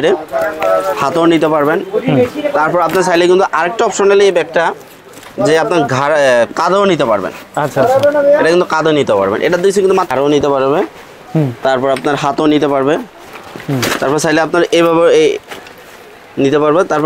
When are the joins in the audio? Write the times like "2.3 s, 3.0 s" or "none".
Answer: 10.1 s